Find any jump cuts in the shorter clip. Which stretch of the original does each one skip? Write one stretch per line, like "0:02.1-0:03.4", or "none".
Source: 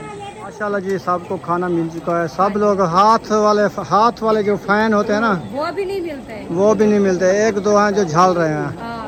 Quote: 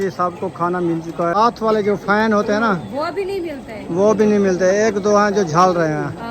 0:02.2-0:04.0